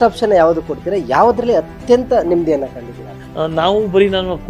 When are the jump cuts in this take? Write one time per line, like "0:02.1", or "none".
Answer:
0:03.1